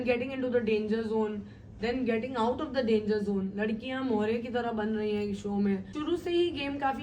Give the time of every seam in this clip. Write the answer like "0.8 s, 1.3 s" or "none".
5.9 s